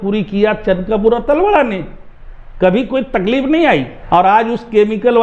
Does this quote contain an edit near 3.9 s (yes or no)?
yes